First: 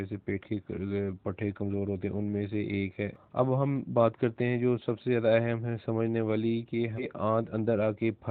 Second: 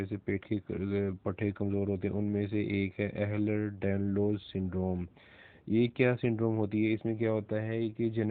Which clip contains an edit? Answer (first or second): first